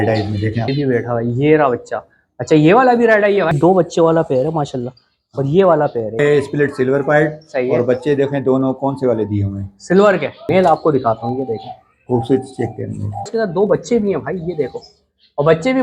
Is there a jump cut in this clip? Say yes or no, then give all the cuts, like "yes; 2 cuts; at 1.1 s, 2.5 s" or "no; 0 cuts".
yes; 5 cuts; at 0.7 s, 3.5 s, 6.2 s, 10.4 s, 13.3 s